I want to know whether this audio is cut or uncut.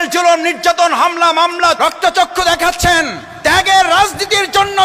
cut